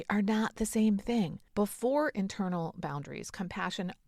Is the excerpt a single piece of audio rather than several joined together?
no; 1 cut; at 1.4 s

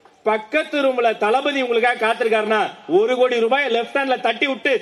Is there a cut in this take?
no; 0 cuts

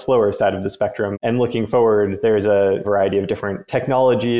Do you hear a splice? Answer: yes; 2 cuts; at 1.1 s, 2.8 s

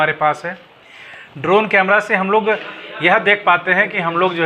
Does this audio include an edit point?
no; 0 cuts

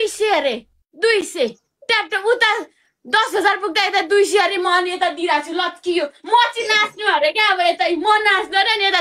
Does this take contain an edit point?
no; 0 cuts

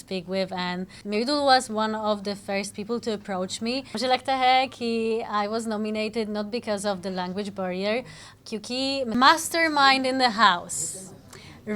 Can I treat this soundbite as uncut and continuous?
no; 3 cuts; at 0.9 s, 3.9 s, 9.1 s

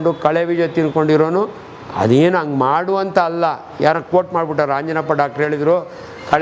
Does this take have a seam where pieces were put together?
no; 0 cuts

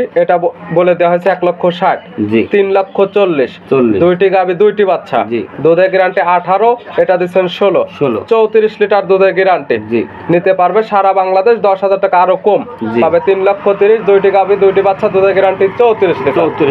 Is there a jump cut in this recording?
no; 0 cuts

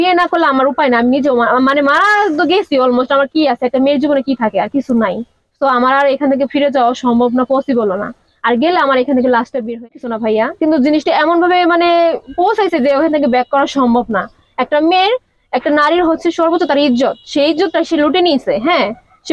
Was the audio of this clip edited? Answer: yes; 1 cut; at 9.9 s

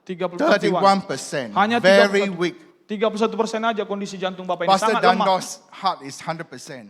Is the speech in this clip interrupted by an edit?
no; 0 cuts

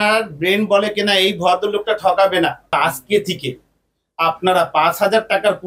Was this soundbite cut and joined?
yes; 1 cut; at 2.7 s

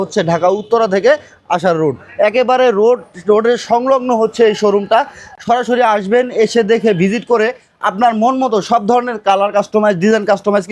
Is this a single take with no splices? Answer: yes; 0 cuts

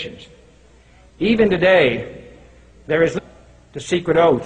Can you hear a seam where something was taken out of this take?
no; 0 cuts

